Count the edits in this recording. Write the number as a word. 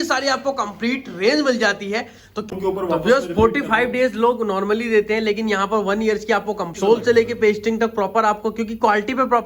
two